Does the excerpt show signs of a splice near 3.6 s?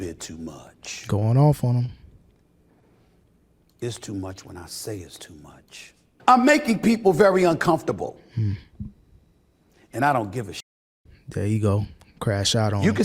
no; 1 cut; at 6.1 s

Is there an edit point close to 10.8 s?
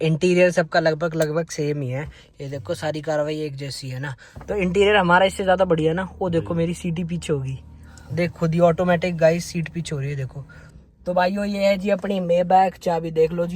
yes; 1 cut; at 10.8 s

